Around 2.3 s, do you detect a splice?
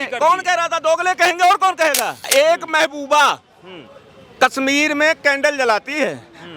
yes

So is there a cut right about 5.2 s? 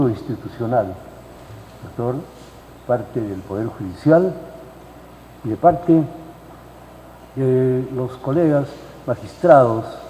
yes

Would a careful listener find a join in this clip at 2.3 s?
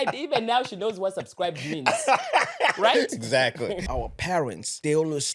no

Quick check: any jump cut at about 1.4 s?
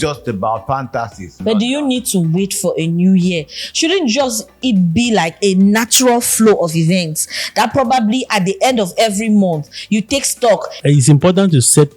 yes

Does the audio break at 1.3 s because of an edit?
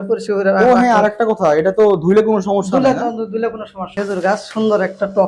no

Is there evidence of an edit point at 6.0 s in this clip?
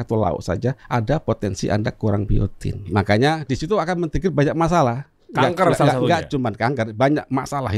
no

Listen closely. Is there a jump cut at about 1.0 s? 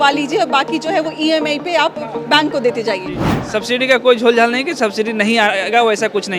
no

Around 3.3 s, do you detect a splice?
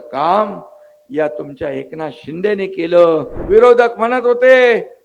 yes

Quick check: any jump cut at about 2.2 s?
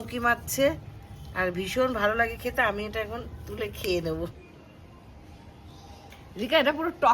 no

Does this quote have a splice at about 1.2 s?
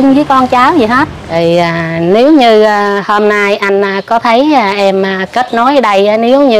yes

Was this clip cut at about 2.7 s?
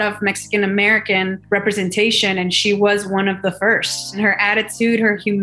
no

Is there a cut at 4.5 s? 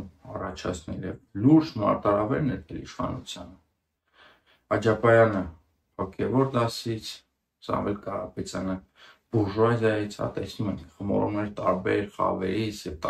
no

